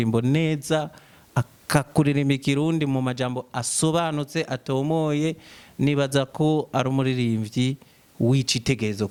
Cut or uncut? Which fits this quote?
uncut